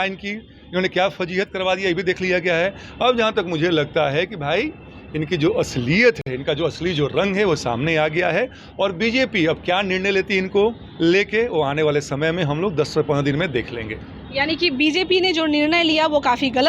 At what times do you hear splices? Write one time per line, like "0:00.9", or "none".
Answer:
none